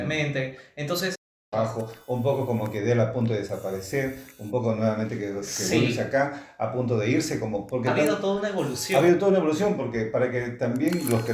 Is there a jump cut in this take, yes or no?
yes